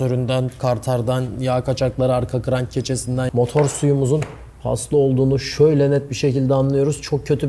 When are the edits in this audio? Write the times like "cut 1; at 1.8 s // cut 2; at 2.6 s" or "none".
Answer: cut 1; at 3.3 s